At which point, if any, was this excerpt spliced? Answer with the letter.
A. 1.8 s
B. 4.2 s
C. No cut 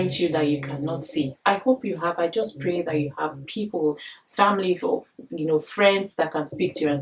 C